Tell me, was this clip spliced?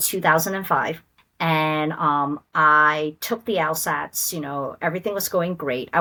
no; 0 cuts

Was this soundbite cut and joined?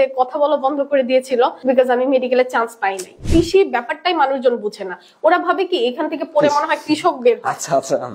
yes; 2 cuts; at 1.6 s, 3.2 s

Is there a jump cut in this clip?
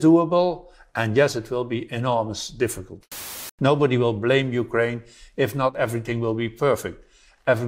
yes; 2 cuts; at 3.1 s, 5.7 s

